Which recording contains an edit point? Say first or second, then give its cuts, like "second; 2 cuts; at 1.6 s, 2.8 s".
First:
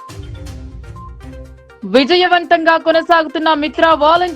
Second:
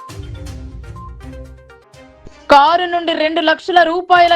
second; 1 cut; at 1.4 s